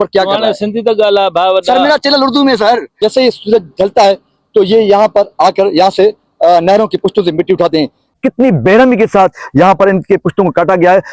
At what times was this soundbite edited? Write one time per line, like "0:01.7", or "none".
0:02.9
0:08.2